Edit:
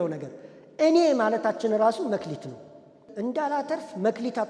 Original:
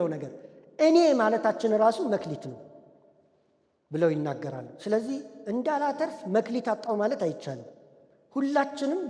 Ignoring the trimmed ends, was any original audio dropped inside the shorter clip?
yes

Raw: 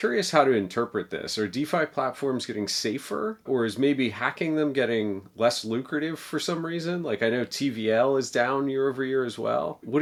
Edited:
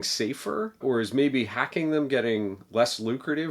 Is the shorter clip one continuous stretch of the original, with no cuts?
yes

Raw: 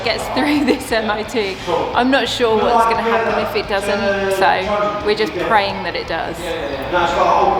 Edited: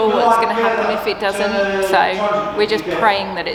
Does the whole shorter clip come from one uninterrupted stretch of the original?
yes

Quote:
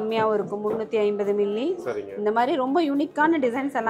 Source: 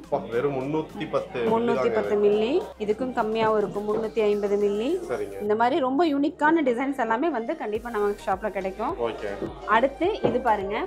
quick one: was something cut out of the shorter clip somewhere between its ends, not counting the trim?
no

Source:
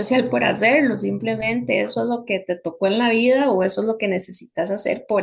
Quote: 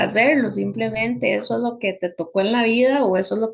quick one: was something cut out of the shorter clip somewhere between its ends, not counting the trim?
no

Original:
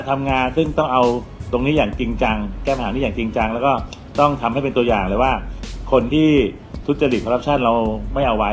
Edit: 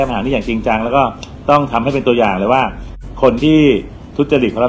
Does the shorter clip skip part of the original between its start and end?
no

